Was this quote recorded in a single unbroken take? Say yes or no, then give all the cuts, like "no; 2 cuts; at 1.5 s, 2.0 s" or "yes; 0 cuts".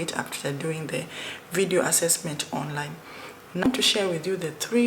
no; 1 cut; at 3.7 s